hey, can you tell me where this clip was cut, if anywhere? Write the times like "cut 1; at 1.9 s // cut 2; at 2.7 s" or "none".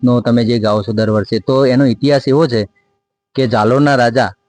none